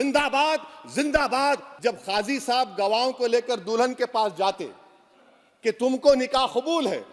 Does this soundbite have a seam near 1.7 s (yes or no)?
yes